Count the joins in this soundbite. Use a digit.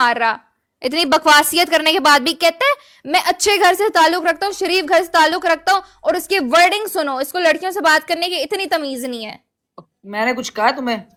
0